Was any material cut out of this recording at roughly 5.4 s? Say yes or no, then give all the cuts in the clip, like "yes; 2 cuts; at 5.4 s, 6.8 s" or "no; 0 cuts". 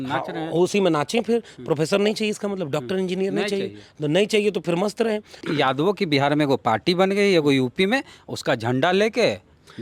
yes; 1 cut; at 5.4 s